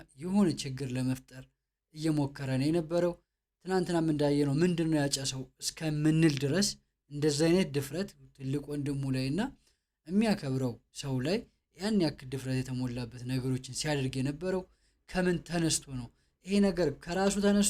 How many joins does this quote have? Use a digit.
0